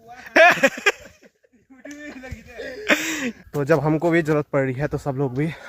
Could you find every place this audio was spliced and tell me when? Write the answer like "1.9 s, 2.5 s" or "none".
3.4 s